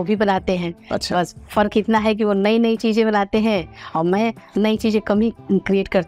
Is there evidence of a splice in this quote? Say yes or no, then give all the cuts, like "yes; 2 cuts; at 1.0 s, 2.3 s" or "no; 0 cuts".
no; 0 cuts